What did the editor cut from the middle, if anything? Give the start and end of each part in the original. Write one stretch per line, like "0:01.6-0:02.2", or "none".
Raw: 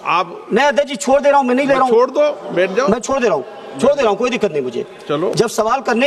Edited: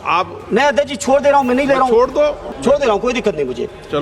0:02.4-0:03.6

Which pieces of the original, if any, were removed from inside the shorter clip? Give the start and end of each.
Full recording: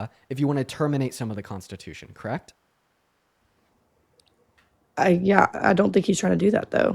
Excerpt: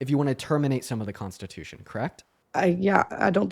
0:02.6-0:04.7

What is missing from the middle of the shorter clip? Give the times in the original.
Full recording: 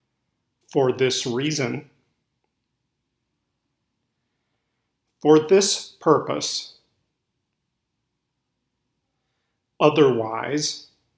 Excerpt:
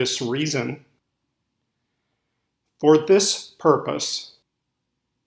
0:02.0-0:03.4
0:06.8-0:08.1

